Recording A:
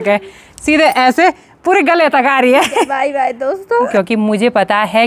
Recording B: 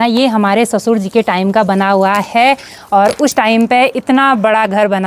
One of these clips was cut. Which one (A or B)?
A